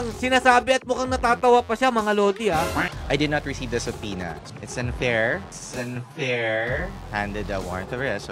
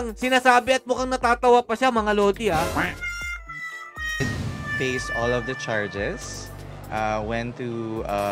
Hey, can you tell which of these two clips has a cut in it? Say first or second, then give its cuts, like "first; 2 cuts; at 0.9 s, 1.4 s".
first; 3 cuts; at 3.0 s, 5.6 s, 7.0 s